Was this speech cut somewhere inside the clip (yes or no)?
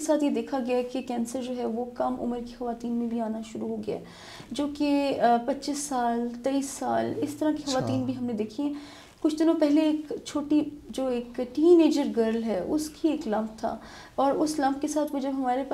no